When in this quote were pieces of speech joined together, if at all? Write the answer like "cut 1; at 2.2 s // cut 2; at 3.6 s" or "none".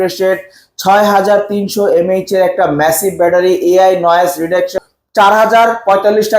cut 1; at 4.7 s